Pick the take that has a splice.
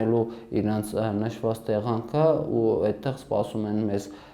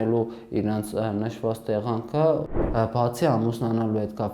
second; 1 cut; at 2.4 s

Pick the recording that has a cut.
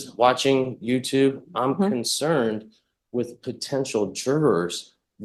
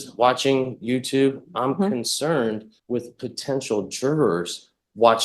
second; 1 cut; at 2.7 s

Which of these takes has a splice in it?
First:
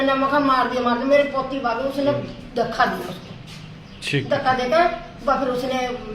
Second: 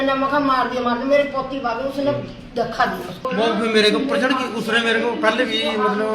second; 1 cut; at 3.2 s

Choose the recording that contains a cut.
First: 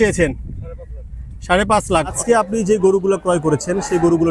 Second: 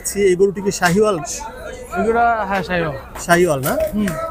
first; 1 cut; at 2.2 s

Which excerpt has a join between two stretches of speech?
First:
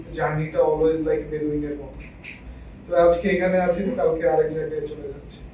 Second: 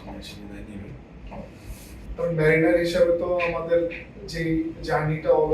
second; 1 cut; at 2.0 s

